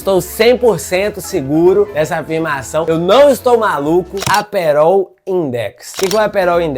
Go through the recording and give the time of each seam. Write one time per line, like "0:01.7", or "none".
0:04.2